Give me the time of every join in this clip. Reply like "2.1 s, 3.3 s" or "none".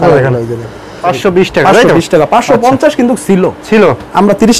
1.0 s